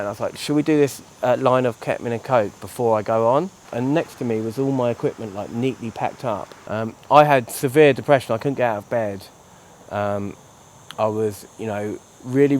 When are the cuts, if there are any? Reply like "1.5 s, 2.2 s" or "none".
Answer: 3.7 s, 6.5 s